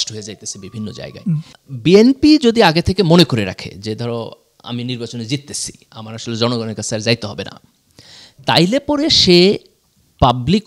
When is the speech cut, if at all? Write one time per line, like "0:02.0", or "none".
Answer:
0:01.5